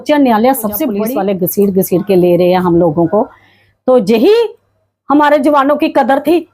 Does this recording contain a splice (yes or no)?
yes